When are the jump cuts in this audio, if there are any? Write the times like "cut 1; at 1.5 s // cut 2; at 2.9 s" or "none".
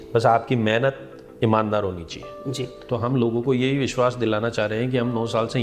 cut 1; at 2.7 s